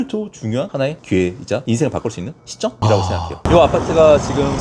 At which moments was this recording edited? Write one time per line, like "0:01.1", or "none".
0:03.5